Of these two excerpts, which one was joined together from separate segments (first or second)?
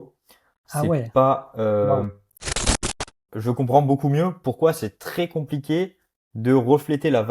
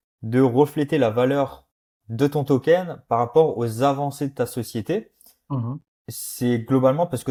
first